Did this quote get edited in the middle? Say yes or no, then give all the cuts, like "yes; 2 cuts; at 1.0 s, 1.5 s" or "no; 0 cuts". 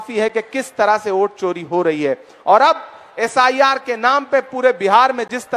no; 0 cuts